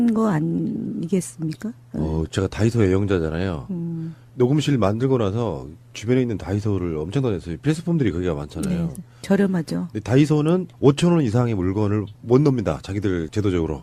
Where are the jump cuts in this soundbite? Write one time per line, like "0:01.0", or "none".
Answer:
none

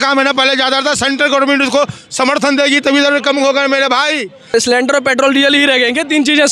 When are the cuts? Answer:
0:04.5

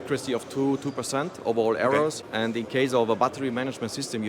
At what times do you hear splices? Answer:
0:02.2

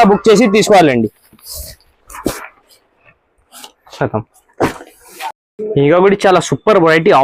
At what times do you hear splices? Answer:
none

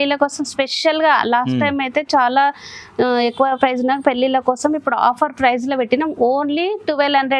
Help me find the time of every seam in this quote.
none

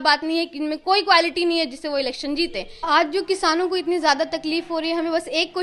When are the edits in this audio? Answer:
0:02.7

